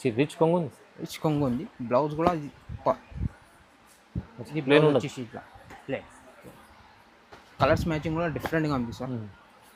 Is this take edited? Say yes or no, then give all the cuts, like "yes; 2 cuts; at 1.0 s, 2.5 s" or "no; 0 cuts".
no; 0 cuts